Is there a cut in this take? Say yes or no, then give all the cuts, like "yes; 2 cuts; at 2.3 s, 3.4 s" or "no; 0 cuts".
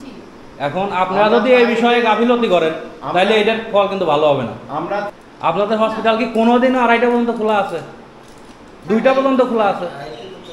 yes; 1 cut; at 5.1 s